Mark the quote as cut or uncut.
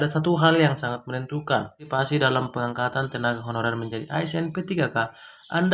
cut